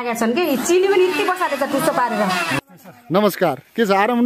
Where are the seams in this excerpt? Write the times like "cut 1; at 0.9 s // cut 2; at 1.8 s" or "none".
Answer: cut 1; at 2.6 s